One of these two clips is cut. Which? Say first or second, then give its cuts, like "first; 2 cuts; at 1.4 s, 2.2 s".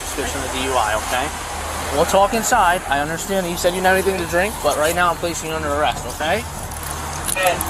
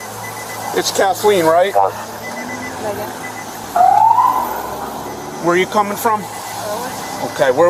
first; 1 cut; at 1.3 s